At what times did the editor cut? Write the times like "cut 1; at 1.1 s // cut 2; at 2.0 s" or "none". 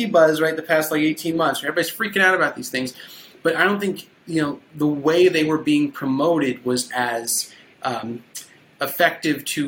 none